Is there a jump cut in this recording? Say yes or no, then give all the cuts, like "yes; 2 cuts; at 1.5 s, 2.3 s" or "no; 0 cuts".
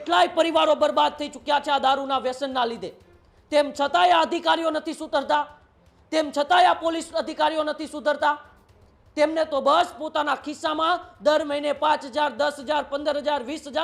no; 0 cuts